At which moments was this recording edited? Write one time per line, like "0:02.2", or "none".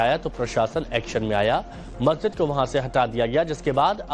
0:01.8